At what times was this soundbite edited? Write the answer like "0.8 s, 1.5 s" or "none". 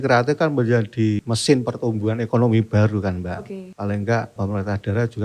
1.2 s, 3.6 s, 4.4 s